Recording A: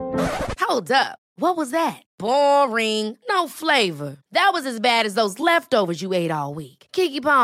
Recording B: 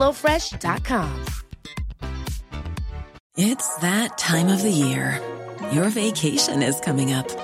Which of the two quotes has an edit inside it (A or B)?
B